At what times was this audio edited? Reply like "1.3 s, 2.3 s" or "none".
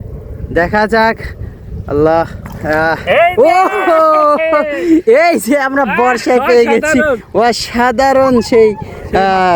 none